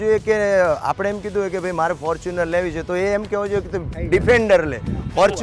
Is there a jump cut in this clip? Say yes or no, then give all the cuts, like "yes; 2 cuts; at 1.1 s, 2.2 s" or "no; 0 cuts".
no; 0 cuts